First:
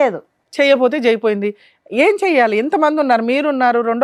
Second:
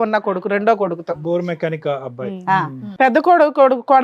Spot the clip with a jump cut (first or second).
second